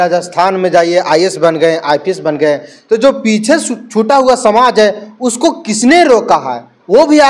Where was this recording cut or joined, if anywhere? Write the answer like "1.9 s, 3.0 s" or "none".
none